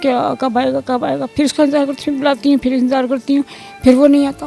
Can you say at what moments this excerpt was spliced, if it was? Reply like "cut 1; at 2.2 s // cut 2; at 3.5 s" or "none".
none